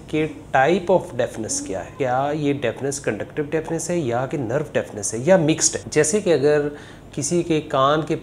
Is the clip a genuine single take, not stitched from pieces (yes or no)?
no